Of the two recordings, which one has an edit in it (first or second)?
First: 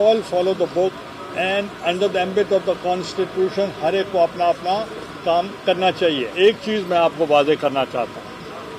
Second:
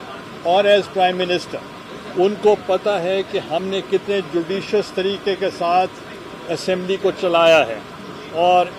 first